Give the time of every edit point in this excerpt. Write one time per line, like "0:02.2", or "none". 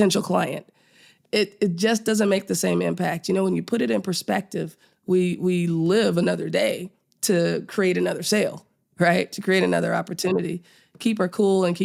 none